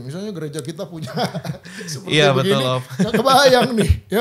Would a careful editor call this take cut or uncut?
uncut